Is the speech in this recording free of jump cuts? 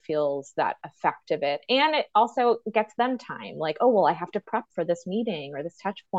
yes; 0 cuts

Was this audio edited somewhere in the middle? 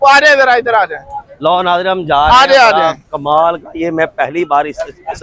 no; 0 cuts

